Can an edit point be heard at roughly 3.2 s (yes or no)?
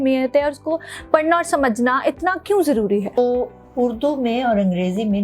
yes